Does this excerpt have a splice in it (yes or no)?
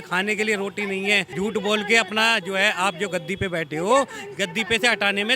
yes